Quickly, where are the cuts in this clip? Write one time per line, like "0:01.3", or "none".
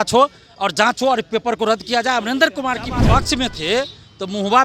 0:03.0